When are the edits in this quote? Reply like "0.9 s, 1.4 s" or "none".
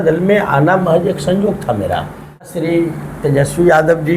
2.5 s